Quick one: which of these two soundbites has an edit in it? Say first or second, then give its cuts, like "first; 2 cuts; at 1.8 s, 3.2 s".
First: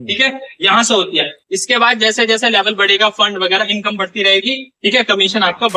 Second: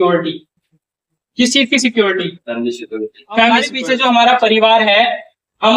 second; 1 cut; at 3.7 s